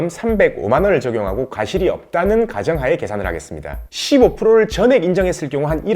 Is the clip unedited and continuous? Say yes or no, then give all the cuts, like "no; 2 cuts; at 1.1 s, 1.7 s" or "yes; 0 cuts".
no; 1 cut; at 3.9 s